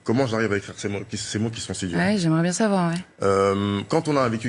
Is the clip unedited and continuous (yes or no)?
no